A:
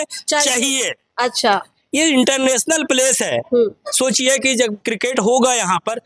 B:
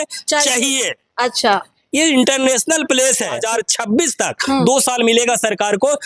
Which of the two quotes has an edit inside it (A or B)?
B